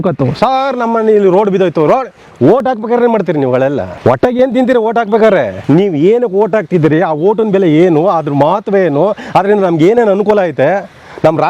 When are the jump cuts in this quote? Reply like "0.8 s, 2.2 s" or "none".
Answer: 3.9 s, 5.6 s